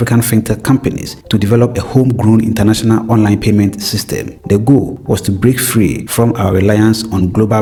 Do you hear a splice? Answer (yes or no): no